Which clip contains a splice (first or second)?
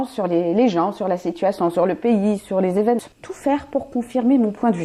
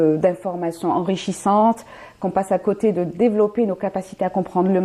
first